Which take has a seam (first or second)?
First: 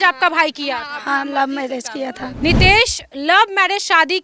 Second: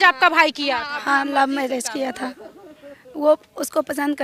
first